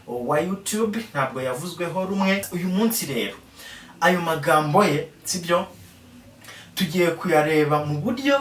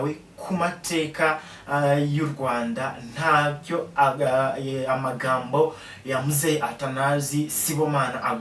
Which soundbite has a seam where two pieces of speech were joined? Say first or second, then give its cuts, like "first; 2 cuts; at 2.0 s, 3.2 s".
first; 1 cut; at 2.5 s